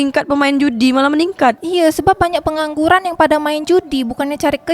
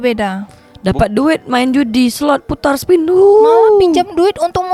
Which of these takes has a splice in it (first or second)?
first